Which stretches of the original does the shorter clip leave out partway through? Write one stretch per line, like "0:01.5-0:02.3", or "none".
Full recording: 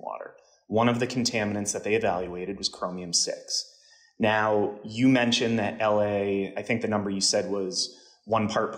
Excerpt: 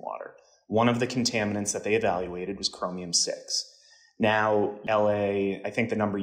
0:04.8-0:05.7